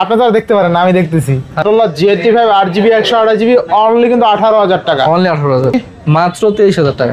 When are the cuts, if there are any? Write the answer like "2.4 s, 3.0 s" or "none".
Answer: 1.6 s, 5.7 s